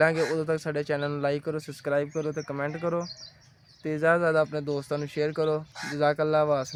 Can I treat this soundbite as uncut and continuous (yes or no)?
yes